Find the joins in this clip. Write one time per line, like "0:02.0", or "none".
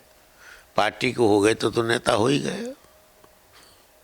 none

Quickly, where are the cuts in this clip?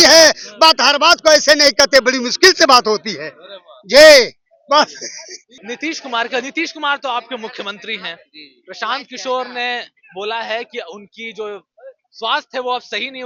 none

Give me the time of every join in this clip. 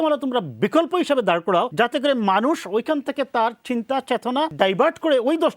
0:01.7
0:04.5

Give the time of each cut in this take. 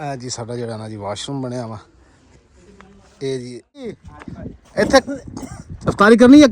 0:04.0

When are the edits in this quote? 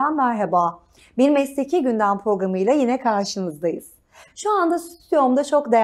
none

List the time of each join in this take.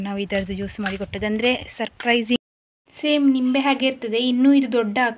0:02.4

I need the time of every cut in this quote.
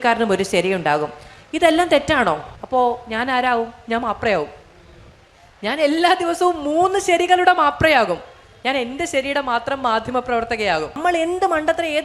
0:02.5
0:11.0

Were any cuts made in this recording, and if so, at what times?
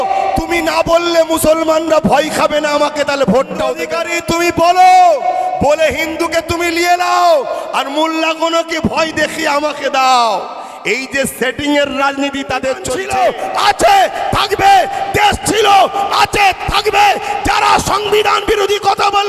0:03.9
0:12.9

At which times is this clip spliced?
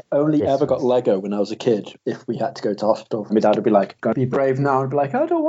0:01.9
0:03.3
0:03.9

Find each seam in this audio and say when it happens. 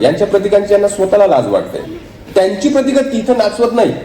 0:02.2

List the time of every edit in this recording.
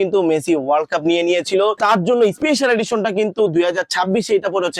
0:02.1

